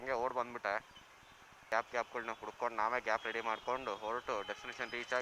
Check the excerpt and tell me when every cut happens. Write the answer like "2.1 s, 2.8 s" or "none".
1.7 s